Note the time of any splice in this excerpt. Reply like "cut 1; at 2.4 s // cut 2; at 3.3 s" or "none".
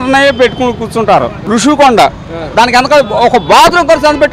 cut 1; at 1.4 s